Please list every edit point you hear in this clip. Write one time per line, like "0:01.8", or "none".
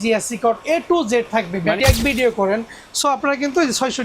0:01.8